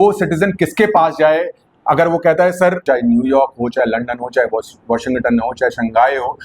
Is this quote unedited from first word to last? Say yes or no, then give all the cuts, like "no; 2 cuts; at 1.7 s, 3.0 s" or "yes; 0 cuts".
no; 1 cut; at 2.8 s